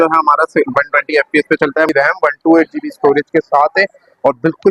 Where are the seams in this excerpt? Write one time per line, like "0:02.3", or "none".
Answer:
0:01.9